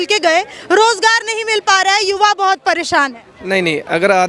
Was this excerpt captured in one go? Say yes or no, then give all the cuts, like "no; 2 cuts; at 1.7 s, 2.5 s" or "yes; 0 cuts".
yes; 0 cuts